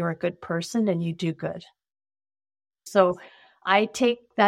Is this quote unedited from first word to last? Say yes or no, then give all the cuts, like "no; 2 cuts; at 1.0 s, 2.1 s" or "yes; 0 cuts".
no; 1 cut; at 2.8 s